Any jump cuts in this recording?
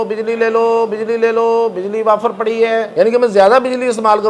yes; 1 cut; at 2.9 s

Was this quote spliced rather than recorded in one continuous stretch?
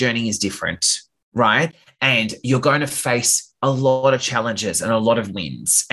no; 0 cuts

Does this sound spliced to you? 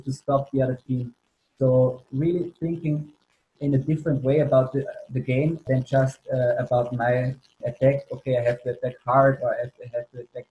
yes; 2 cuts; at 5.6 s, 7.6 s

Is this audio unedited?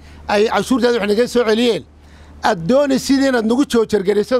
yes; 0 cuts

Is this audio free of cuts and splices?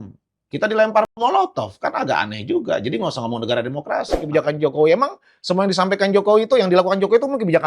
no; 1 cut; at 4.2 s

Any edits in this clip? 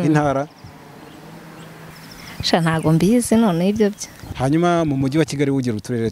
yes; 2 cuts; at 1.9 s, 4.3 s

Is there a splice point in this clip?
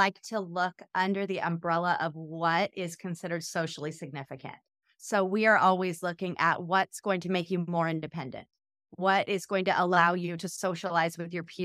no; 0 cuts

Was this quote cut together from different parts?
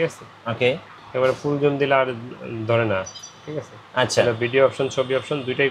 no; 0 cuts

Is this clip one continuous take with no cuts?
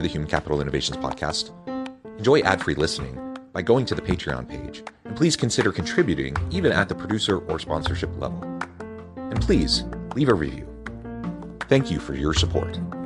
yes; 0 cuts

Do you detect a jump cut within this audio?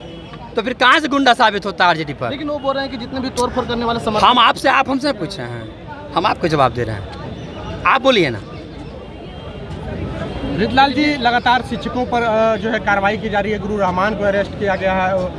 no; 0 cuts

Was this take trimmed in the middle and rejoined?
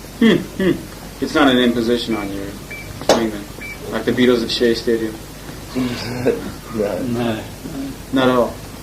yes; 1 cut; at 5.2 s

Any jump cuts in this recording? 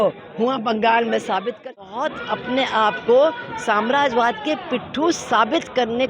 yes; 1 cut; at 1.7 s

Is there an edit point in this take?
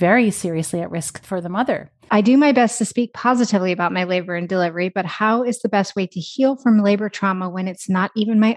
yes; 2 cuts; at 1.1 s, 1.9 s

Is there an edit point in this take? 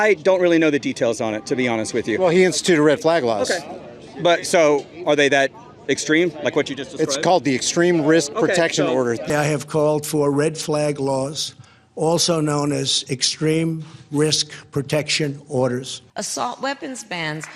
no; 0 cuts

